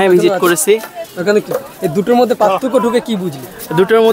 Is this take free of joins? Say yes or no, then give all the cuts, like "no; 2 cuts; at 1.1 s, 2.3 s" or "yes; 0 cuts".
yes; 0 cuts